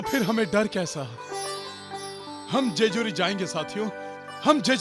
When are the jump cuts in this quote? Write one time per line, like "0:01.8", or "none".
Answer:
0:01.3